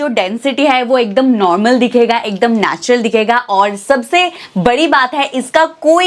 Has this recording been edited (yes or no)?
no